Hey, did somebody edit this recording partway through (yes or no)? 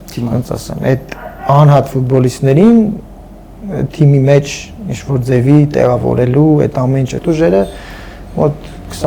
yes